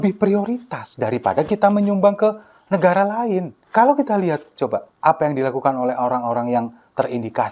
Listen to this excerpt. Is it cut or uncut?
cut